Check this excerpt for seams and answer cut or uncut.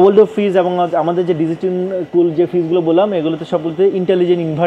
uncut